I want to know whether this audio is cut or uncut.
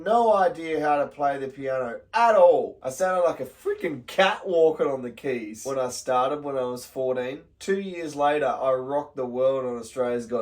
cut